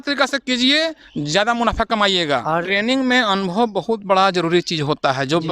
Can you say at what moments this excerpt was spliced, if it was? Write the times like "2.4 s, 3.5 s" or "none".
2.4 s